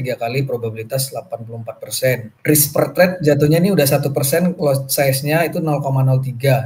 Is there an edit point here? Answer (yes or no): yes